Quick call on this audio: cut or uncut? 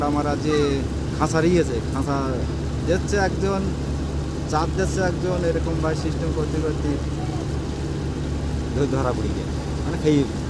uncut